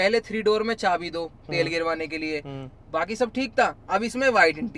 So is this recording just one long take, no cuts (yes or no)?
yes